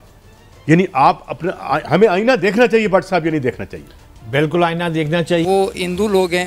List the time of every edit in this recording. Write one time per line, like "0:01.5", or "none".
0:05.4